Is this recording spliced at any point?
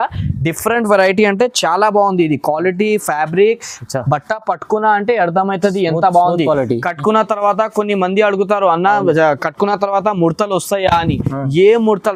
no; 0 cuts

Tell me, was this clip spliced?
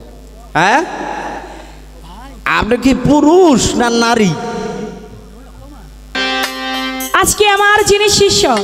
yes; 1 cut; at 6.1 s

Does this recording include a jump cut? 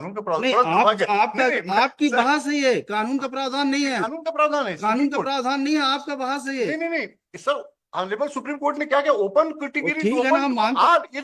no; 0 cuts

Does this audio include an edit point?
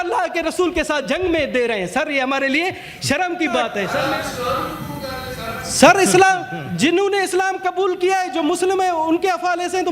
yes; 1 cut; at 3.9 s

